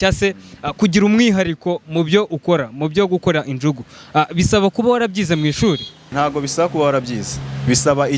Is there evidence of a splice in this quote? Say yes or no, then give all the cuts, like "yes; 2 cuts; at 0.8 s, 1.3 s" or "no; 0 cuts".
yes; 1 cut; at 6.1 s